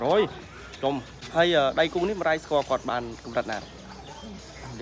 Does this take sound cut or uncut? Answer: cut